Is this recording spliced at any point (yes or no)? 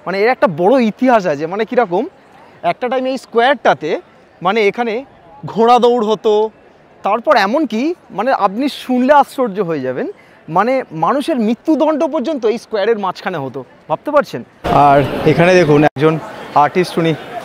yes